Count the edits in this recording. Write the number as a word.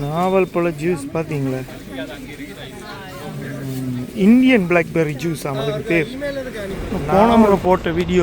one